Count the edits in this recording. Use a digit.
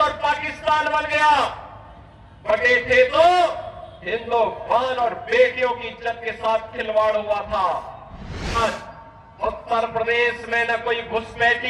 1